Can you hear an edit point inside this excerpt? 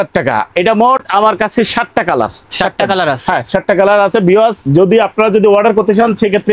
no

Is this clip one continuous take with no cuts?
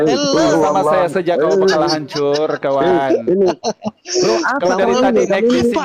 yes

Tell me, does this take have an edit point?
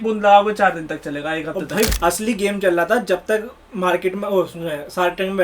yes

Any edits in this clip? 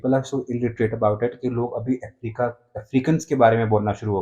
no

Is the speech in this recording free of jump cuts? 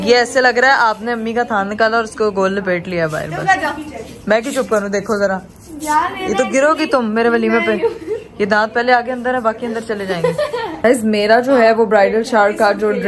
yes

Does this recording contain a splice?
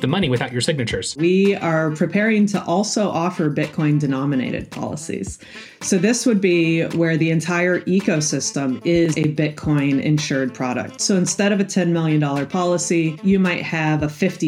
yes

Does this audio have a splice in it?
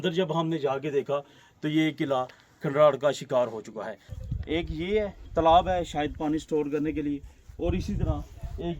yes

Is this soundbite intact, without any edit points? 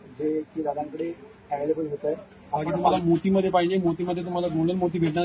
no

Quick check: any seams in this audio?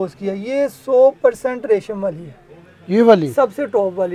no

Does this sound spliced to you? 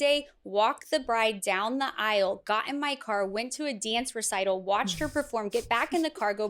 no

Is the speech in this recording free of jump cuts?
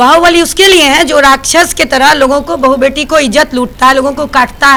yes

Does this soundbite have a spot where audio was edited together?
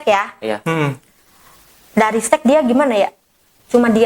no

